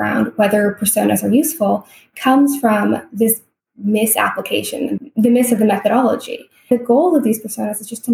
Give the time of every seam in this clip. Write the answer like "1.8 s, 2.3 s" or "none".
5.0 s, 6.7 s